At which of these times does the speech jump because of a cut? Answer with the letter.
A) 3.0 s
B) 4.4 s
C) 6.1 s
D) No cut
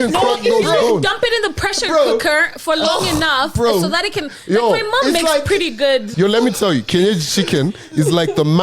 C